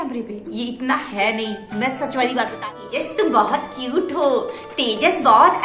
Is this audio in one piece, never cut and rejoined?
no; 1 cut; at 2.6 s

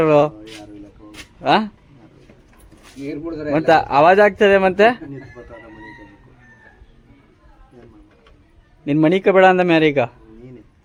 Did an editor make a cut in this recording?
no; 0 cuts

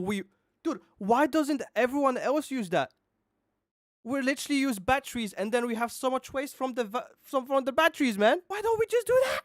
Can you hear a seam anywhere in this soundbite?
yes; 1 cut; at 8.5 s

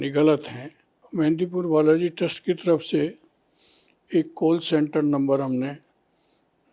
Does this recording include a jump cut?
yes; 1 cut; at 1.0 s

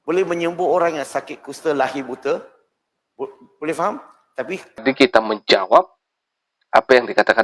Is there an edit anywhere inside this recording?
yes; 1 cut; at 4.8 s

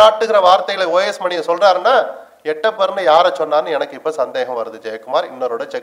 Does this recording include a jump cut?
no; 0 cuts

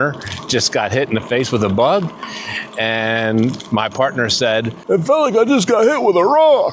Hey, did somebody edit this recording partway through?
yes; 1 cut; at 4.8 s

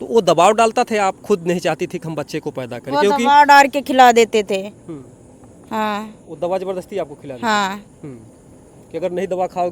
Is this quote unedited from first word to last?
yes; 0 cuts

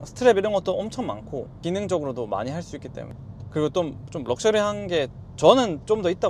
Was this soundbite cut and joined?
yes; 1 cut; at 1.5 s

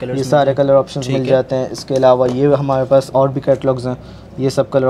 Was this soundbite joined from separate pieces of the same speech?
no; 0 cuts

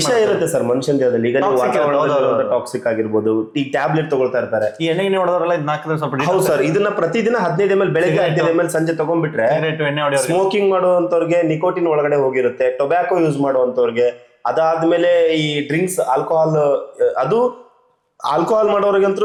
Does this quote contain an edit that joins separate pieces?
no; 0 cuts

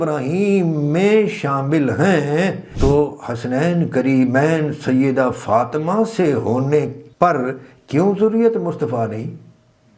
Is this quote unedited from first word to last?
no; 2 cuts; at 2.7 s, 7.0 s

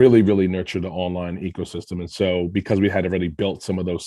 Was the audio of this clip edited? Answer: no; 0 cuts

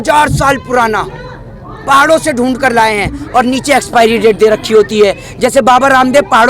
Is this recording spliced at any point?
no; 0 cuts

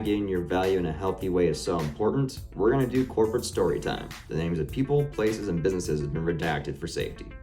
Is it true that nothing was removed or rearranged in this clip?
yes; 0 cuts

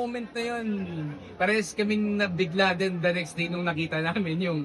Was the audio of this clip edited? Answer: no; 0 cuts

